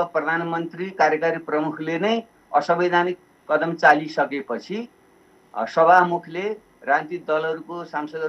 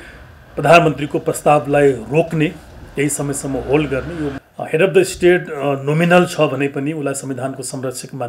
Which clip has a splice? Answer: second; 1 cut; at 4.4 s

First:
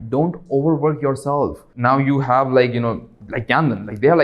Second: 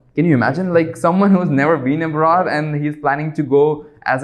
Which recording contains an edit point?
first; 1 cut; at 1.7 s

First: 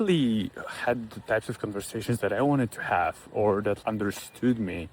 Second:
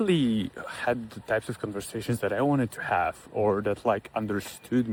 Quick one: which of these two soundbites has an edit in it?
first; 1 cut; at 3.8 s

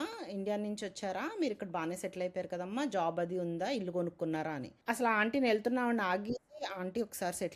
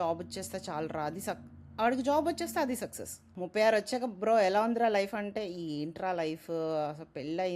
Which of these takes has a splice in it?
second; 1 cut; at 3.3 s

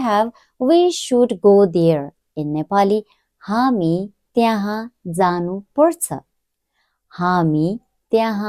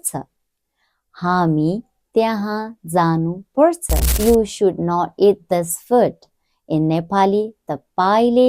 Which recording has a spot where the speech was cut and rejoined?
second; 1 cut; at 4.0 s

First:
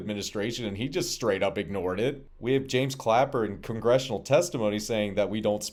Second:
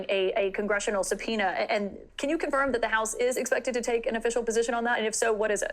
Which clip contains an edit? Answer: second; 1 cut; at 2.0 s

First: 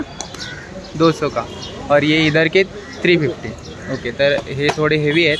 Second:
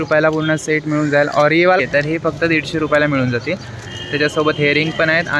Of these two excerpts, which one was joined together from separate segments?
second; 1 cut; at 1.8 s

